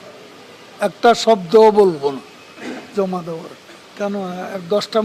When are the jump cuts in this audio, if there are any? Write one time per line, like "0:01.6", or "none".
0:03.9